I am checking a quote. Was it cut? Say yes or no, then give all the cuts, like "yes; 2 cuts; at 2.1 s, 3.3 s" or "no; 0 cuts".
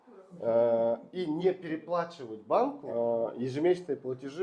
yes; 1 cut; at 2.8 s